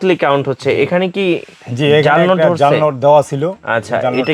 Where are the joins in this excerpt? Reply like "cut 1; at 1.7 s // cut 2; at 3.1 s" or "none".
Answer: none